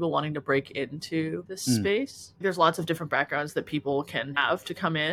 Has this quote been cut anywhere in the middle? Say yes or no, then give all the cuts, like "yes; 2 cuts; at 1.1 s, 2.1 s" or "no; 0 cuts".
yes; 3 cuts; at 1.5 s, 2.4 s, 4.3 s